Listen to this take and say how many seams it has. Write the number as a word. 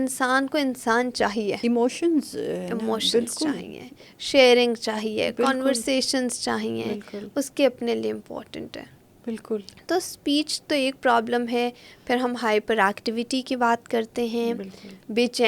zero